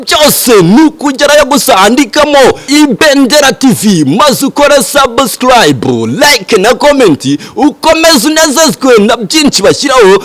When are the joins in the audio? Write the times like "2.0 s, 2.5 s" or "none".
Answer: 2.7 s